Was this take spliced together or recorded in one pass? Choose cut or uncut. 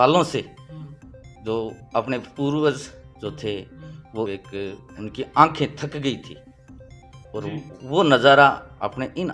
cut